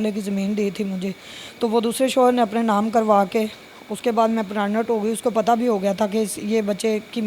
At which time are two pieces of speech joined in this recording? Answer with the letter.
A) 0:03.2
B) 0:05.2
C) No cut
C